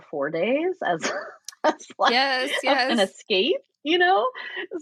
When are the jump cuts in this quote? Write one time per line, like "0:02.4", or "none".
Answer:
none